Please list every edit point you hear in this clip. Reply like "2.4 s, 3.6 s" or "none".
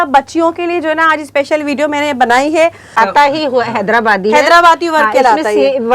3.0 s